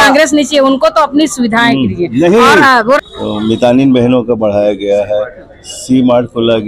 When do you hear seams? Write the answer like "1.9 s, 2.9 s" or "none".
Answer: 3.0 s